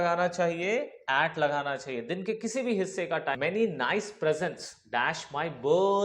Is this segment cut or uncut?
cut